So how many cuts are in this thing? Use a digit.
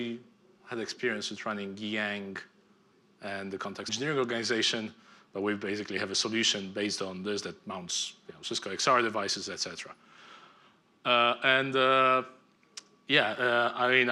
0